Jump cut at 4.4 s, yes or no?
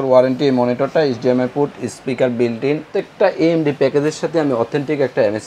no